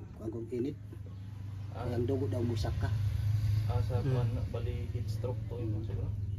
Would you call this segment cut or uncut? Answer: uncut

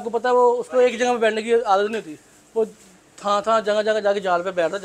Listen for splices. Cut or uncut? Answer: uncut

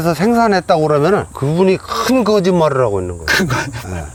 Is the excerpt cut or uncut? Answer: uncut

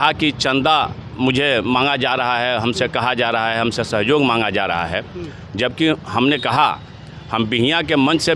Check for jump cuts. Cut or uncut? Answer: uncut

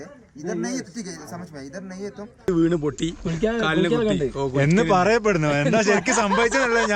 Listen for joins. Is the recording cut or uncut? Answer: cut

